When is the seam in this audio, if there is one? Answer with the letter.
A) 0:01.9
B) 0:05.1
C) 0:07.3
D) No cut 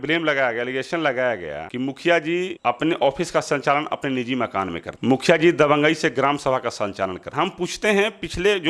C